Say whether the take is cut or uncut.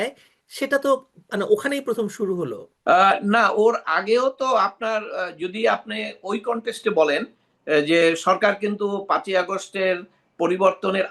uncut